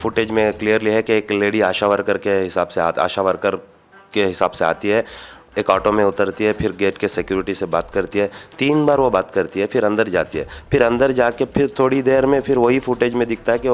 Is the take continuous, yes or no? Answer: yes